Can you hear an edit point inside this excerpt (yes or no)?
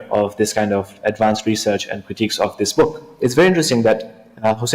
yes